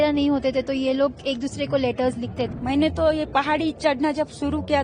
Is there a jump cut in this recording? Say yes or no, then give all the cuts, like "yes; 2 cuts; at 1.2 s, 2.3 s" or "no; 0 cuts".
yes; 1 cut; at 2.4 s